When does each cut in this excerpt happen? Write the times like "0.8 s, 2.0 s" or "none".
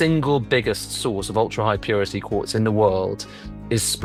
none